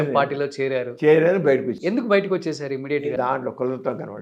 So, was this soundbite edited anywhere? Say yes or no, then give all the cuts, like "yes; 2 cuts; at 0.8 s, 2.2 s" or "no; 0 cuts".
yes; 1 cut; at 3.1 s